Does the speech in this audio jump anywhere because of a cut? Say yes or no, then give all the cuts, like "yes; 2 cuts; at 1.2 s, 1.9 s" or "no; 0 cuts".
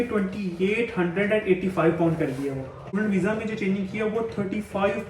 yes; 1 cut; at 2.9 s